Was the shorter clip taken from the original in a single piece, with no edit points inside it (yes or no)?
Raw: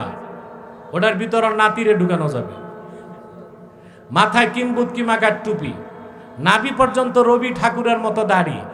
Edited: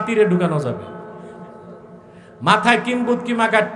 yes